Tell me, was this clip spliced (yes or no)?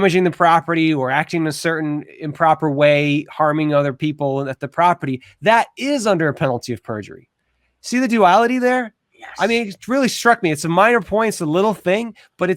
no